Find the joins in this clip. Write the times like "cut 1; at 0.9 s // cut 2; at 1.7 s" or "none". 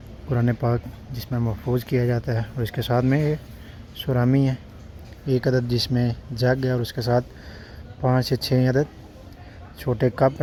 none